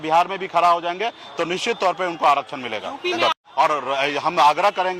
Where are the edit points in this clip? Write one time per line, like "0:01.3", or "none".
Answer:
0:03.4